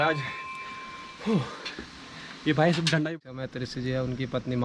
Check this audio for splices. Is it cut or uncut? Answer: cut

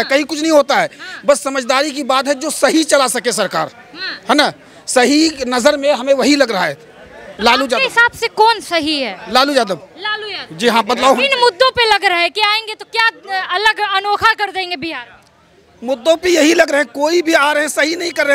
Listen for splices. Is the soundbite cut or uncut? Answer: uncut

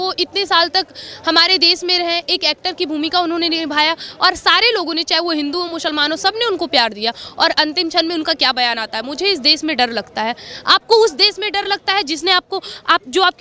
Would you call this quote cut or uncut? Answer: uncut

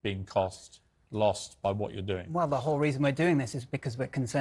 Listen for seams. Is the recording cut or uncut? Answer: uncut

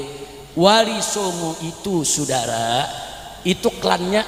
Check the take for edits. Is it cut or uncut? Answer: uncut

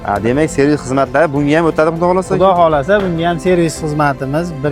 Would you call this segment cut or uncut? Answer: uncut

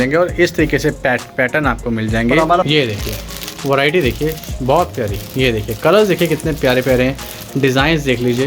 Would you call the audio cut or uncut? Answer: cut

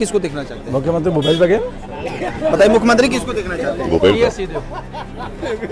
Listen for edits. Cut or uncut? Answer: uncut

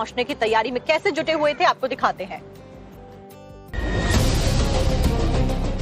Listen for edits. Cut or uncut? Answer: cut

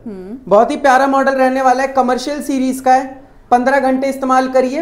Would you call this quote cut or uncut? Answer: uncut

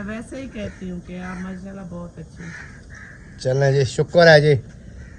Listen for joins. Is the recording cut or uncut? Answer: uncut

